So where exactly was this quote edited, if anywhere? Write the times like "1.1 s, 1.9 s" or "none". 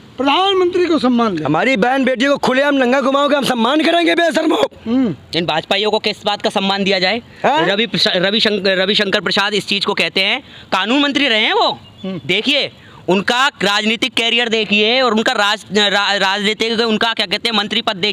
none